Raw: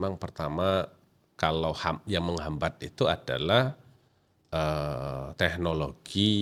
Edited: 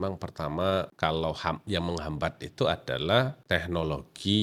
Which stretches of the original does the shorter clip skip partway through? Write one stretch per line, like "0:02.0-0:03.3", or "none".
0:00.9-0:01.3
0:03.8-0:05.3